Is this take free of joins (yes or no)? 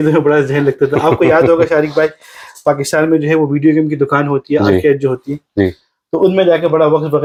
yes